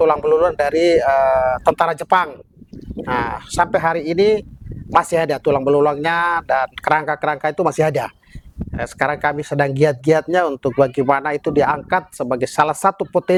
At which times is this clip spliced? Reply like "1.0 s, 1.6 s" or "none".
none